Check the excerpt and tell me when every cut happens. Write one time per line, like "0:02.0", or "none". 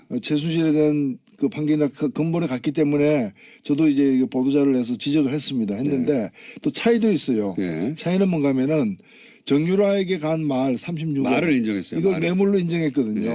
0:09.3